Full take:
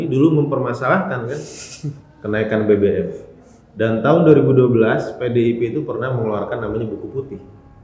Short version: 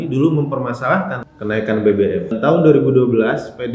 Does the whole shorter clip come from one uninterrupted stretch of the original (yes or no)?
no